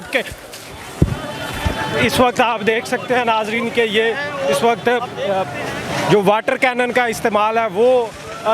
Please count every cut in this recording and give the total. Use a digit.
0